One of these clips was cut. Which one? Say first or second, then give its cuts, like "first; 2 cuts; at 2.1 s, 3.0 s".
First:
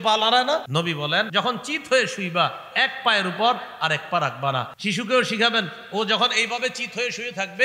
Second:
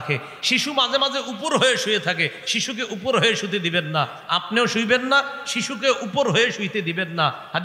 first; 2 cuts; at 1.2 s, 4.7 s